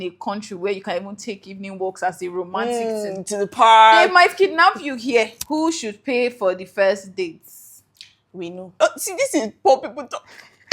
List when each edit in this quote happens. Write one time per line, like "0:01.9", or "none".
0:05.4
0:08.8

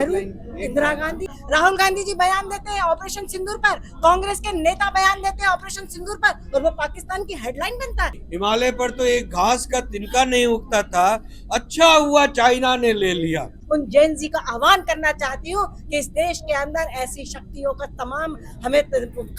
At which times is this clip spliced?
0:01.3
0:08.2
0:13.5

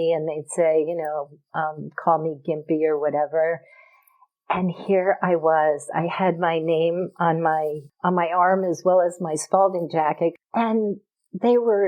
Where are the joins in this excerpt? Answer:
0:07.8
0:10.4

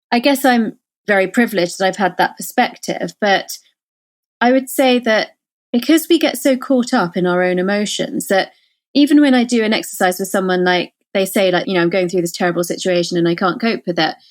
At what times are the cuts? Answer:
0:01.1
0:11.6

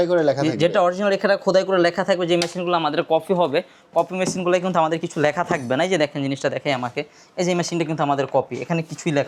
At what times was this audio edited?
none

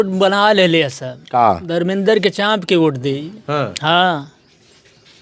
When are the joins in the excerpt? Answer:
none

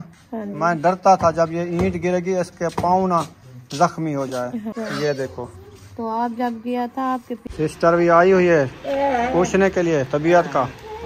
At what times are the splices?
0:04.7
0:07.4

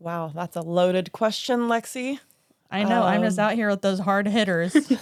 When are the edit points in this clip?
none

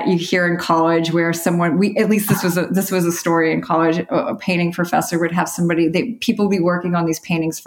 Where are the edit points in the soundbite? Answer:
none

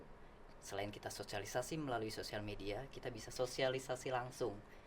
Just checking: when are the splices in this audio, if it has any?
0:03.3

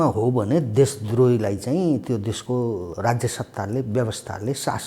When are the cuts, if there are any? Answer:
0:02.9

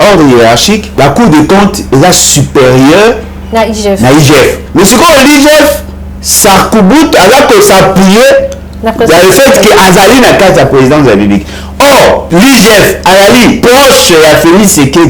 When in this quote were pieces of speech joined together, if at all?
0:00.9
0:04.6
0:12.2
0:13.6

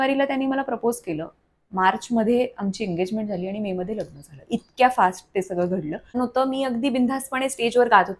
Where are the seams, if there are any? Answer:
0:06.1

